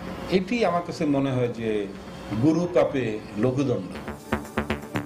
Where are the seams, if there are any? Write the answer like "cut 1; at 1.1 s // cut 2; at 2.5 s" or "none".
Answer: cut 1; at 4.2 s